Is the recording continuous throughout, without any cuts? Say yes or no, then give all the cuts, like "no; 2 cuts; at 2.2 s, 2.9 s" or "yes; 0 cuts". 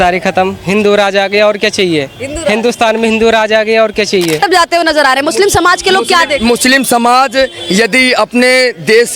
no; 1 cut; at 4.4 s